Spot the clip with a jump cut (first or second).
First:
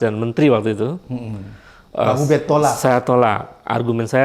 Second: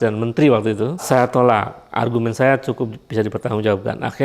second